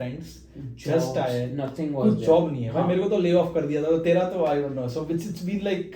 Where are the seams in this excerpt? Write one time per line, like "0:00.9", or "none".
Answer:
none